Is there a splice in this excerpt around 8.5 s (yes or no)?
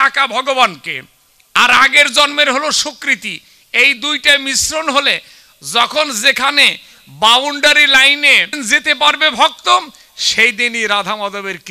yes